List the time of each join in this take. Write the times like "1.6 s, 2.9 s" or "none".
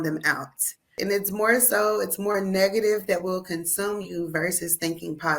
1.0 s